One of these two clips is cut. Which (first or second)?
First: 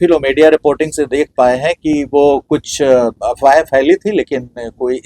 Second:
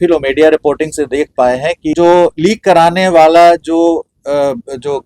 second